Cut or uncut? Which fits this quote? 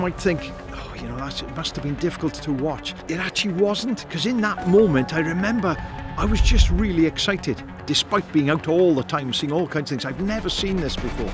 cut